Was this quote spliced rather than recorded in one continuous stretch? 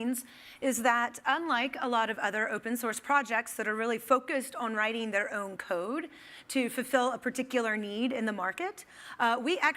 yes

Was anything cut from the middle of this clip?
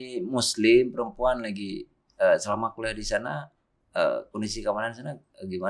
no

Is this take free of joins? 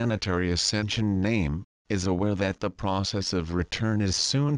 yes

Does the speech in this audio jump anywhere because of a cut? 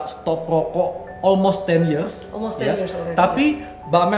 no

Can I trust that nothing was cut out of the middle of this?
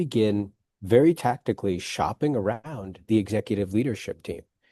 yes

